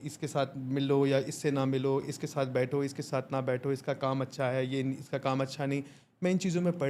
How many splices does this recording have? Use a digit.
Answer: 0